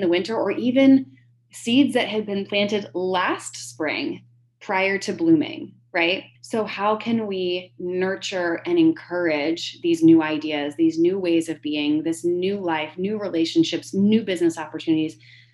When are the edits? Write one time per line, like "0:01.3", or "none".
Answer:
0:06.3